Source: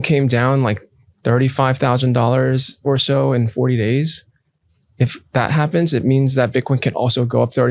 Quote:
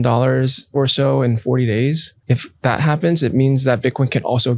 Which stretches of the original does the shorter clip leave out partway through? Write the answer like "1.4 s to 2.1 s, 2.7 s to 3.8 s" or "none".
4.2 s to 4.8 s